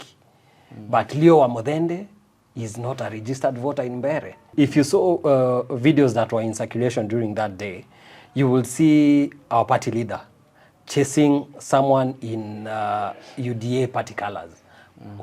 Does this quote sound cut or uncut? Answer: cut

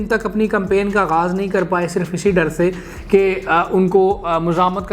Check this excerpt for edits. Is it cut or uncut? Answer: uncut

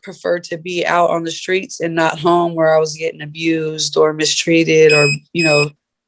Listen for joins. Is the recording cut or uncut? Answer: uncut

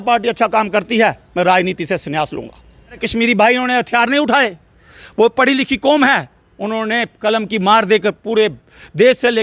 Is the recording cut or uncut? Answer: cut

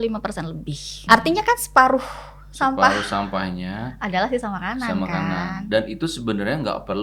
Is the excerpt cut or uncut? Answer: cut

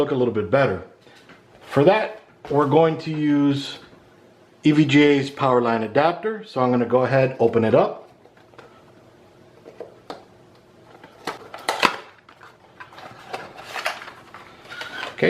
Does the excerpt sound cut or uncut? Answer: cut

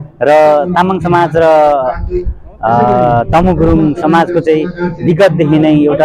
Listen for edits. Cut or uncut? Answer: uncut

